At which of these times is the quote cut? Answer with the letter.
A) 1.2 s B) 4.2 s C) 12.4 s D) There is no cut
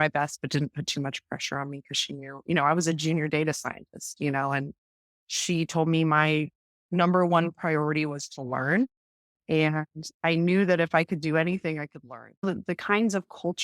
C